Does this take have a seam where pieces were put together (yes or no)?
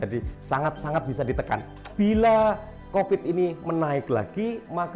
yes